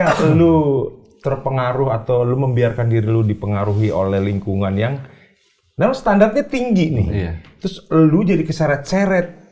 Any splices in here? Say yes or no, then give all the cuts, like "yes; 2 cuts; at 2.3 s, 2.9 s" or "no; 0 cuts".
no; 0 cuts